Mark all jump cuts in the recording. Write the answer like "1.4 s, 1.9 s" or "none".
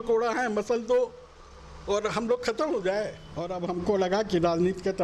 3.6 s